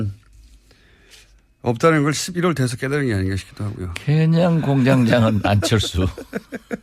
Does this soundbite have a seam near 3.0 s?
yes; 1 cut; at 3.0 s

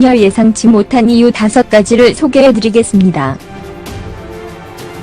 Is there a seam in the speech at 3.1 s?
yes; 2 cuts; at 1.3 s, 3.1 s

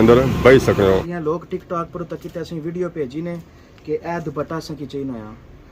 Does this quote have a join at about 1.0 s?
yes; 1 cut; at 1.0 s

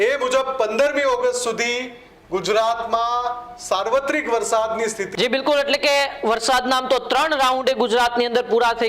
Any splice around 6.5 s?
no; 1 cut; at 5.0 s

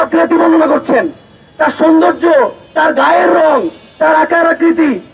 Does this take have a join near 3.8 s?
no; 0 cuts

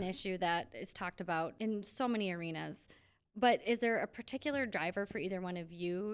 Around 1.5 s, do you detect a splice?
yes; 1 cut; at 1.5 s

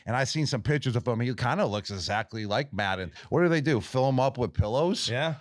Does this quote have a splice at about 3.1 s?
yes; 1 cut; at 3.1 s

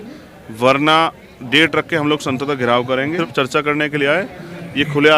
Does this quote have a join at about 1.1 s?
no; 1 cut; at 3.2 s

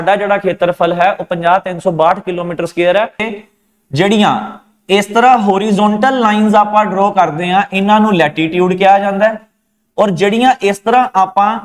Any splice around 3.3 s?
yes; 1 cut; at 3.3 s

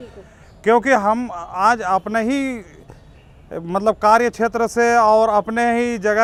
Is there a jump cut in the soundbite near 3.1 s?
no; 0 cuts

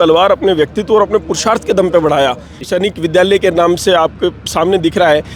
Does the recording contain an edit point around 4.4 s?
no; 1 cut; at 2.6 s

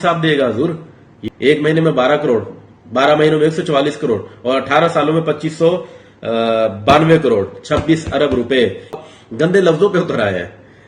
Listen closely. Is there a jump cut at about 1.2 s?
yes; 2 cuts; at 1.2 s, 9.0 s

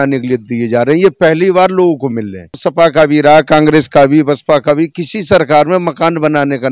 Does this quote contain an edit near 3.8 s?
no; 1 cut; at 2.6 s

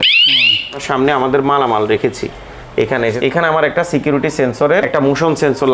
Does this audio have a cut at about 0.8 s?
yes; 3 cuts; at 0.8 s, 3.2 s, 4.9 s

